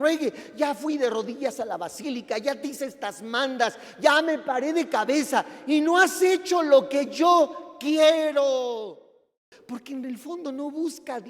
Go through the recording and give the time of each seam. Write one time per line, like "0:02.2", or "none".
0:09.5